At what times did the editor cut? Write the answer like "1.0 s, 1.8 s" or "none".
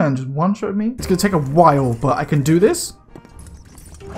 1.0 s